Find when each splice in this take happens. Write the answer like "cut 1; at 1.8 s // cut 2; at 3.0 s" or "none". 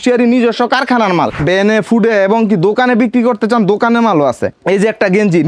cut 1; at 1.4 s // cut 2; at 4.5 s